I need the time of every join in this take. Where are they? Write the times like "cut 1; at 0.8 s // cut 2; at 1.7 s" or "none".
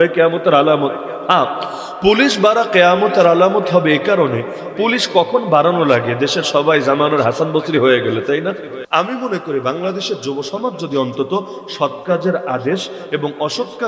cut 1; at 8.8 s